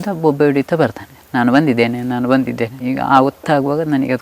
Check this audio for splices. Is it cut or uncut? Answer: uncut